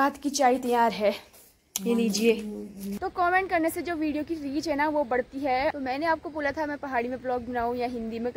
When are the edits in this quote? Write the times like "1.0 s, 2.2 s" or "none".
3.2 s, 5.7 s